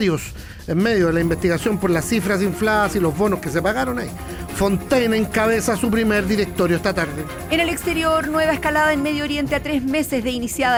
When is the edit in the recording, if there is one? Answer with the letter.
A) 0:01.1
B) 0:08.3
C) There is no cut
C